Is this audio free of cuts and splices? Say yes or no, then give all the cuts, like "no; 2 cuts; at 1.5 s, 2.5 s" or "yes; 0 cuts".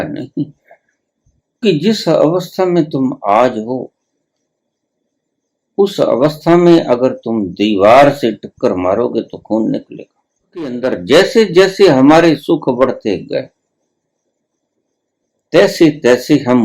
no; 2 cuts; at 1.6 s, 10.7 s